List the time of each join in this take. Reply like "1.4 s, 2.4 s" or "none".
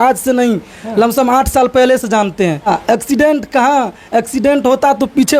2.7 s